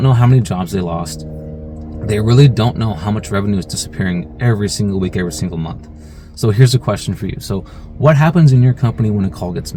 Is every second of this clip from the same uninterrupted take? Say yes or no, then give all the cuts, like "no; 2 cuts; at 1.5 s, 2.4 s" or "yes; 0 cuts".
yes; 0 cuts